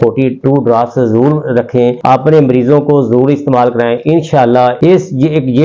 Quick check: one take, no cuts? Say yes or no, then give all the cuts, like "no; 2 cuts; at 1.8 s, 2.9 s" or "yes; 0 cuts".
yes; 0 cuts